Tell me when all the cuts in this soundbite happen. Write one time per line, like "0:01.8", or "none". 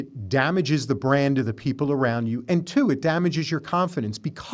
none